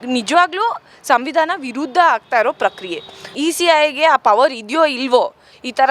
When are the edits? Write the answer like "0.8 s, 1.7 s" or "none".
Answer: 3.4 s